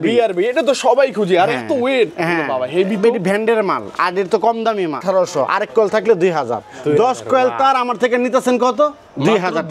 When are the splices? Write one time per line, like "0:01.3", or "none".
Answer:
0:05.0